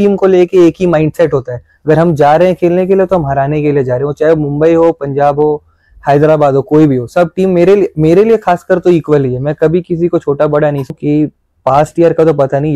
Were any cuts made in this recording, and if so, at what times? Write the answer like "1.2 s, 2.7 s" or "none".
10.9 s